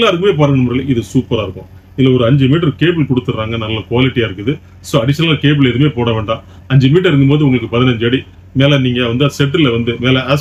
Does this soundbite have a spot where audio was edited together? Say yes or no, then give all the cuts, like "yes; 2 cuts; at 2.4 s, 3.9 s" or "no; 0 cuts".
no; 0 cuts